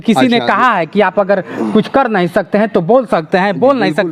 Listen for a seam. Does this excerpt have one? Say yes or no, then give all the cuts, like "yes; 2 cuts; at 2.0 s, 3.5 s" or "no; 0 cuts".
no; 0 cuts